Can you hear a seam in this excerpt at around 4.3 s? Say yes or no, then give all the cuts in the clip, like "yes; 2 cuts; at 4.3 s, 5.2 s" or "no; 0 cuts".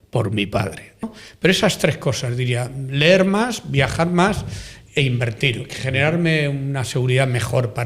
no; 1 cut; at 1.0 s